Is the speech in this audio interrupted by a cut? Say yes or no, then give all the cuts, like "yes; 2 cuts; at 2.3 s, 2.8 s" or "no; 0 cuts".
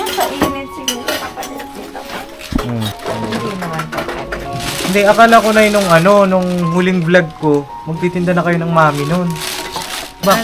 yes; 1 cut; at 2.9 s